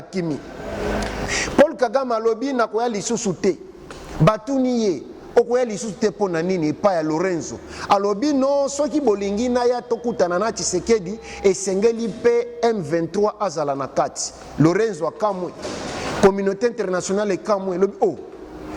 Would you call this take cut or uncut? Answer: cut